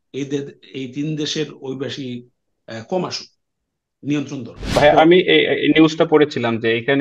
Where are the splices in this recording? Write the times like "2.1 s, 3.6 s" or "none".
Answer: 4.6 s